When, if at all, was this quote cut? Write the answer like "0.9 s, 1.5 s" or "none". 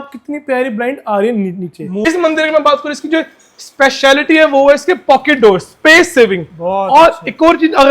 2.1 s